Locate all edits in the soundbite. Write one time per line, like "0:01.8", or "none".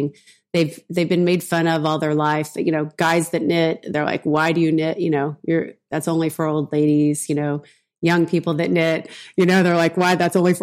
none